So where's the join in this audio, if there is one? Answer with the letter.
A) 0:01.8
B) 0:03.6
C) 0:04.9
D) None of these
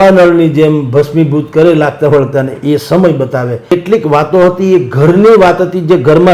B